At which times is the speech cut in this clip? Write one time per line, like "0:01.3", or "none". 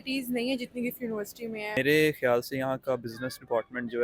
0:01.8